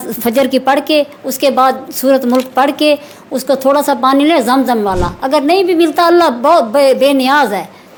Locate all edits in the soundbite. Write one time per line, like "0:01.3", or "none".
none